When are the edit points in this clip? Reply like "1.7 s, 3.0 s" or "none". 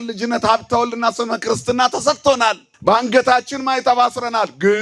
2.7 s

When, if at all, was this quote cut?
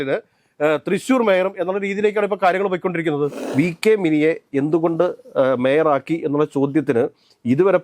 3.4 s

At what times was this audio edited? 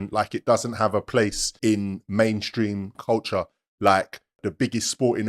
1.5 s, 2.9 s, 4.4 s

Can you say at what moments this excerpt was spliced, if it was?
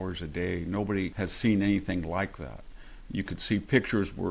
1.1 s

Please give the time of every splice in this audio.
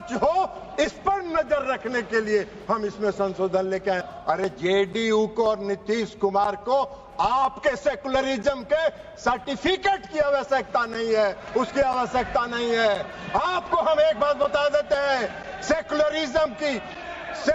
4.1 s

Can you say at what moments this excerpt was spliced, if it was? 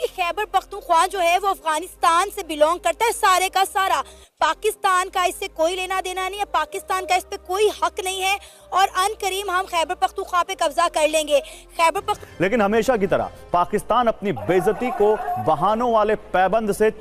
12.2 s

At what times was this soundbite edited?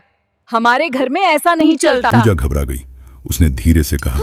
none

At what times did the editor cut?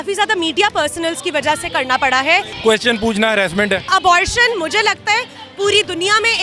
2.5 s, 3.9 s

